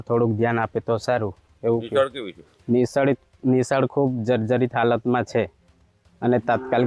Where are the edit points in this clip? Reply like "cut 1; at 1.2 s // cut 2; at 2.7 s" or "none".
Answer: none